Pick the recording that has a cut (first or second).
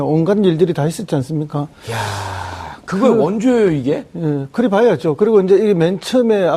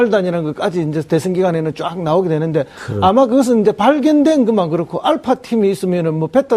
second